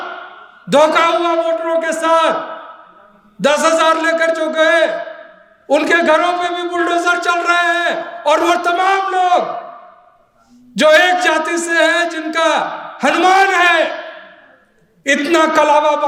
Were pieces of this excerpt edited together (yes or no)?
no